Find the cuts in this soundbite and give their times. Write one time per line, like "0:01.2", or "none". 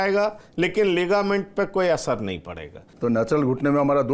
0:02.9